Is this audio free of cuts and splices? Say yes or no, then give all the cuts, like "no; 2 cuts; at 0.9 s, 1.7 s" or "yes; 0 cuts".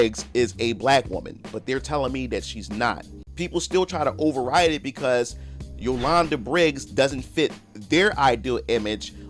no; 1 cut; at 3.2 s